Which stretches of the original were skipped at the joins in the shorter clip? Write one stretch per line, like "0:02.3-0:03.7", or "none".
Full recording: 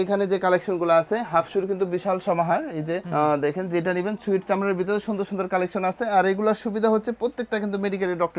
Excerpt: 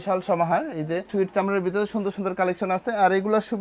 0:03.0-0:04.2